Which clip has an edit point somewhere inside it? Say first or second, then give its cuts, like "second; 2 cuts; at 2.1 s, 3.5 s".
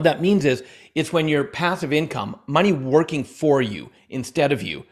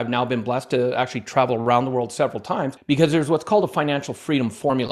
second; 1 cut; at 2.8 s